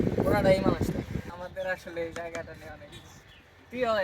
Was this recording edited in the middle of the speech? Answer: yes; 1 cut; at 1.3 s

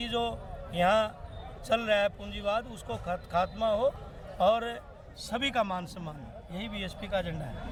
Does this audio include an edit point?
no; 0 cuts

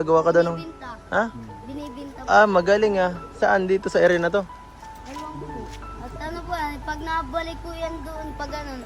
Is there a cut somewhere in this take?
no; 0 cuts

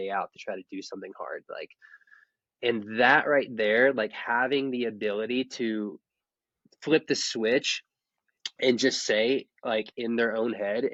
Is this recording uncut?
yes; 0 cuts

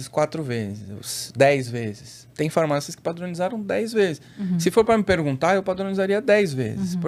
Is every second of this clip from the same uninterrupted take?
yes; 0 cuts

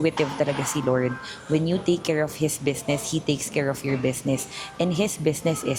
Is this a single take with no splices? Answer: yes; 0 cuts

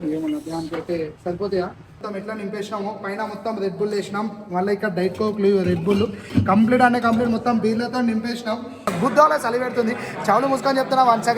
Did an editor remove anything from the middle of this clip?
yes; 2 cuts; at 2.0 s, 8.9 s

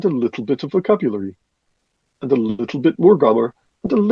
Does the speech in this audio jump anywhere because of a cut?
no; 0 cuts

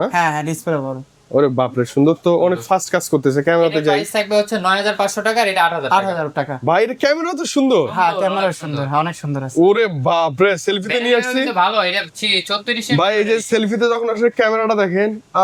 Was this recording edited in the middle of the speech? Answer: no; 0 cuts

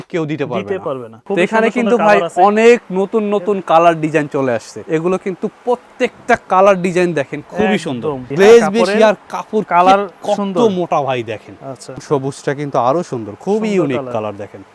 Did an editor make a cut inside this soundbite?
yes; 4 cuts; at 1.1 s, 4.7 s, 8.2 s, 12.0 s

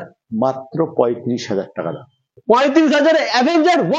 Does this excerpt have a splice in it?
yes; 1 cut; at 2.3 s

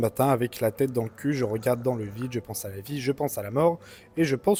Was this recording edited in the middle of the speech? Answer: no; 0 cuts

